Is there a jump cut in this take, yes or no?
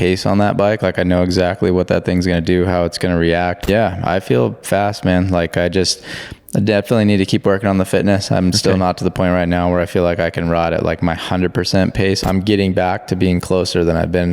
yes